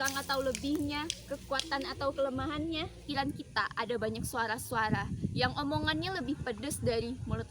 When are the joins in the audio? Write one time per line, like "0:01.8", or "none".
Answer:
0:03.0

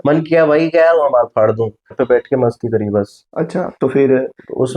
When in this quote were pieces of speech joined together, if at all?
0:01.9

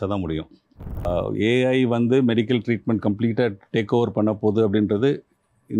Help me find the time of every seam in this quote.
0:01.1

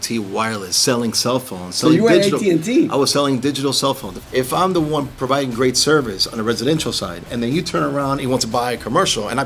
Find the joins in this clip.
0:04.1

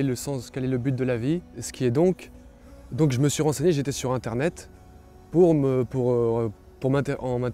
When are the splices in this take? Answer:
0:01.6

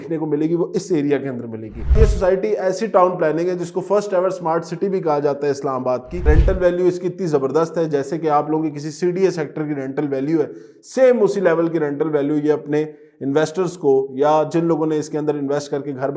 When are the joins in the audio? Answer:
0:02.0
0:06.2

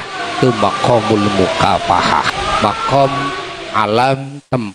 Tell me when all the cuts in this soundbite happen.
0:02.3

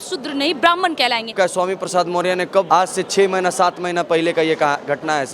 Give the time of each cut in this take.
0:01.3
0:02.7

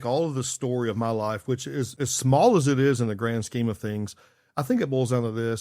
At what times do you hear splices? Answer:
0:01.9

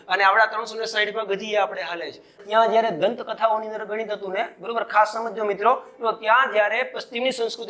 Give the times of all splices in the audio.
0:02.3

